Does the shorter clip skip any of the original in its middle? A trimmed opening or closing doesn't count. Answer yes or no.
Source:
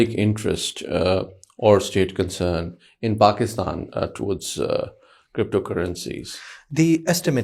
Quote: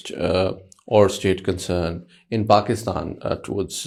no